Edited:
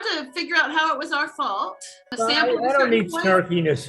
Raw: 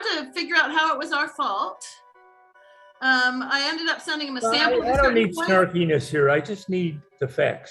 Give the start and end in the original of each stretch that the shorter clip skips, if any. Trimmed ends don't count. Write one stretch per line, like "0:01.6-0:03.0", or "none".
0:02.1-0:04.3